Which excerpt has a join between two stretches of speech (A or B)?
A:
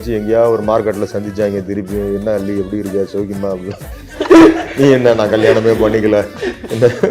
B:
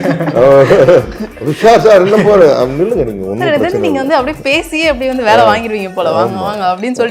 A